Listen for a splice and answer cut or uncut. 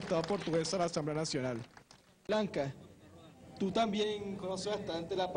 cut